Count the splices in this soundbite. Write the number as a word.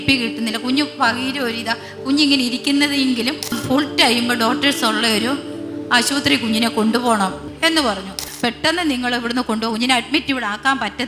three